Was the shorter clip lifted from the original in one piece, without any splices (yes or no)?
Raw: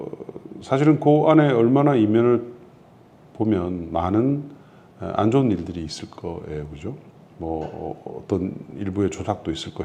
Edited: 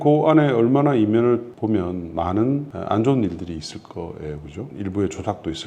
no